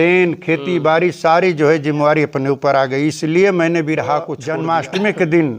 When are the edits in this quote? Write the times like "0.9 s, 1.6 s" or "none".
4.4 s